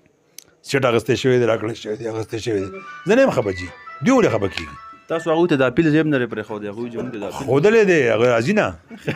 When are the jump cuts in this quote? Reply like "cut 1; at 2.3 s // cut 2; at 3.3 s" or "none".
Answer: none